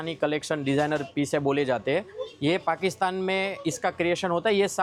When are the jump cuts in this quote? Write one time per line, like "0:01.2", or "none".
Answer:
none